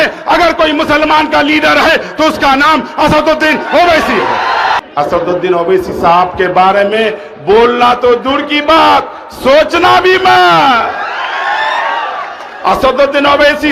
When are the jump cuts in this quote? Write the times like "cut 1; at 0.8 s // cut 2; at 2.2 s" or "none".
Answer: cut 1; at 4.8 s